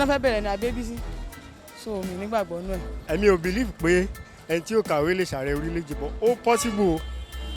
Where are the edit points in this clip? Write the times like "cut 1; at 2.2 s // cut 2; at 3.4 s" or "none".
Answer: cut 1; at 2.9 s